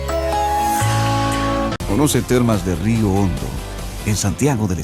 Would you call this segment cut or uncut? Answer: cut